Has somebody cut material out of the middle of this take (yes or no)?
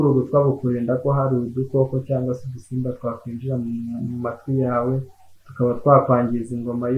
no